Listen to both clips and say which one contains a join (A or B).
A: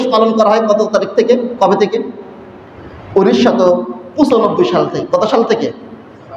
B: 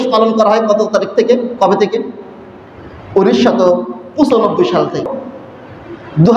B